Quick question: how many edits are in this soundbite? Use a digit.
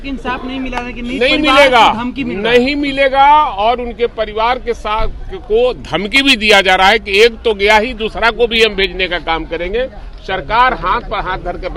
0